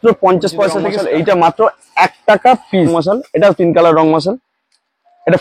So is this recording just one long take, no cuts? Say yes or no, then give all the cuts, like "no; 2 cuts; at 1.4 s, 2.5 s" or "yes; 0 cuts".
no; 2 cuts; at 0.9 s, 2.9 s